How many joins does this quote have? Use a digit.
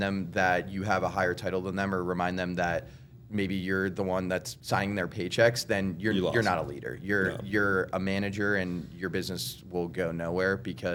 0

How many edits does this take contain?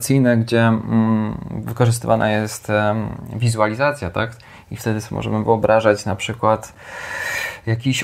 0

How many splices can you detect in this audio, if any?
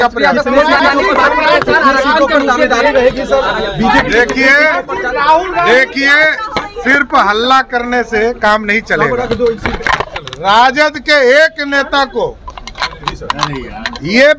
0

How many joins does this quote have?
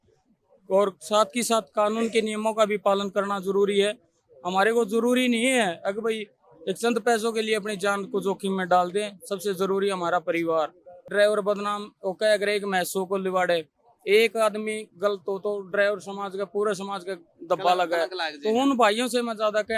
1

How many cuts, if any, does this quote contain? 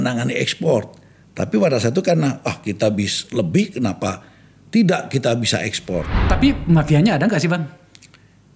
1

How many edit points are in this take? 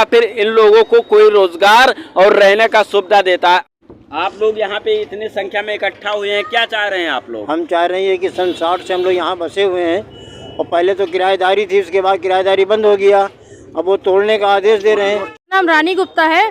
2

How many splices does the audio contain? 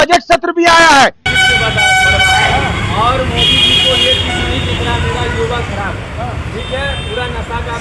1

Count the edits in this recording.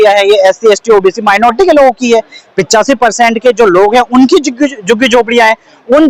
0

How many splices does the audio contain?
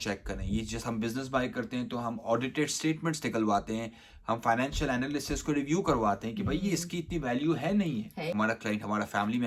1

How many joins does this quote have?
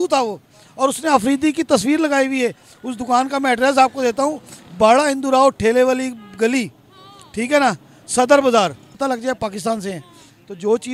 1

